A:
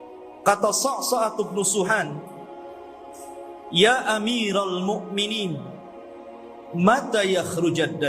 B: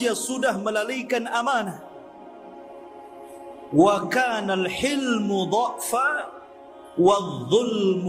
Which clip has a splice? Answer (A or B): B